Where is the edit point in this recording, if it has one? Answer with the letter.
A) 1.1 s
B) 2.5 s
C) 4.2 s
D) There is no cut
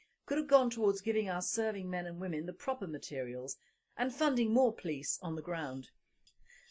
C